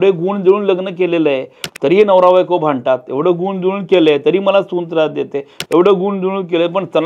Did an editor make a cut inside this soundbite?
no; 0 cuts

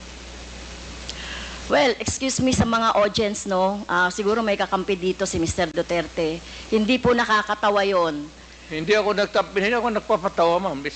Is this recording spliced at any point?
no; 0 cuts

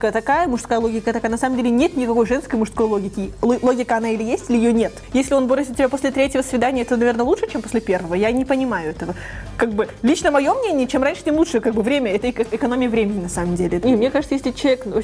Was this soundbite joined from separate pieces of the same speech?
yes; 2 cuts; at 5.0 s, 13.8 s

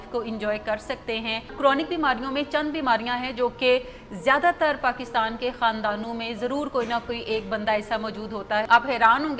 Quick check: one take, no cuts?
no; 2 cuts; at 1.5 s, 8.7 s

